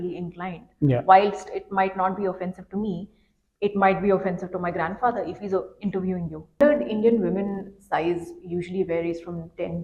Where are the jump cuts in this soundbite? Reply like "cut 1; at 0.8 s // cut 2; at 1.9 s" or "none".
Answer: cut 1; at 6.6 s